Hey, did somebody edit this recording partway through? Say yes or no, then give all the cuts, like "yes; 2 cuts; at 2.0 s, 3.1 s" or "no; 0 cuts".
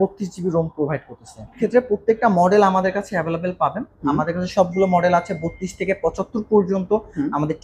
yes; 1 cut; at 1.5 s